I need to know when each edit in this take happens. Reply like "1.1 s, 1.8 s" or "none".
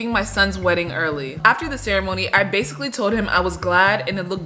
1.3 s